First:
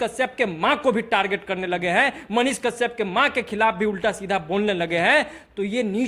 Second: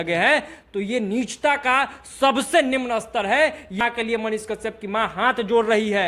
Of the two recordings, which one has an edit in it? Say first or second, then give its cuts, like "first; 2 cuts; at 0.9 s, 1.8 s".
second; 1 cut; at 3.8 s